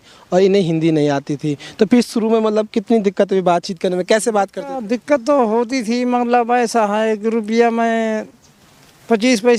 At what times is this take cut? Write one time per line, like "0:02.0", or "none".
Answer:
none